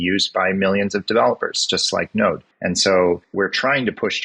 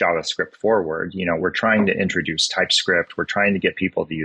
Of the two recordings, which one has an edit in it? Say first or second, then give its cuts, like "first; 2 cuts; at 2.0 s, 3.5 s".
first; 2 cuts; at 2.4 s, 3.3 s